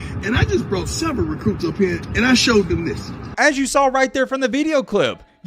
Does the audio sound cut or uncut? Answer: cut